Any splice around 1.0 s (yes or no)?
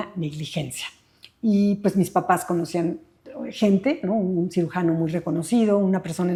no